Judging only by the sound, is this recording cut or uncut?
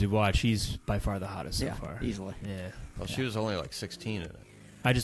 cut